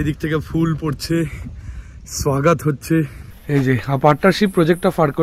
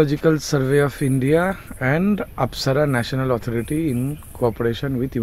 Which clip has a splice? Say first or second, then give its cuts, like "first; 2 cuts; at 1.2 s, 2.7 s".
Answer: first; 1 cut; at 3.2 s